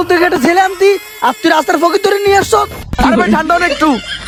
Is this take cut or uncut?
uncut